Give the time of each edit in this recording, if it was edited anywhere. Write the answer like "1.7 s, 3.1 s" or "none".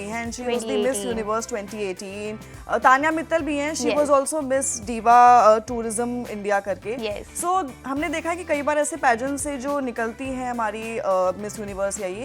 none